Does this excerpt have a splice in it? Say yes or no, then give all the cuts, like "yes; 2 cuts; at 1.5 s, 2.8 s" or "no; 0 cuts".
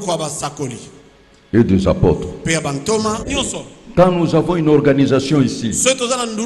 yes; 1 cut; at 3.2 s